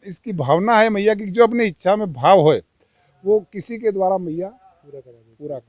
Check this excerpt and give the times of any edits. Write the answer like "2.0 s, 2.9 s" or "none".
none